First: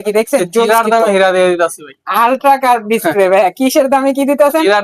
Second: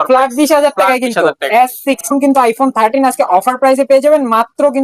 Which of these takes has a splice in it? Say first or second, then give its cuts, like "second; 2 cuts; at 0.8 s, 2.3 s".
second; 1 cut; at 2.1 s